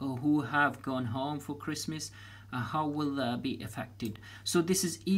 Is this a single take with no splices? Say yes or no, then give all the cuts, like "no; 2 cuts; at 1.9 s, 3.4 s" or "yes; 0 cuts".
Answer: yes; 0 cuts